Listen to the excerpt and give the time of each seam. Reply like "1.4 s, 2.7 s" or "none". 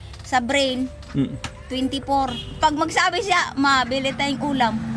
2.4 s